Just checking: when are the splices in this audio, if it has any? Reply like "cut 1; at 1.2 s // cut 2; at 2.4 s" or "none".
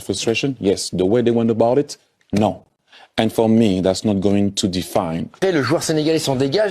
cut 1; at 5.3 s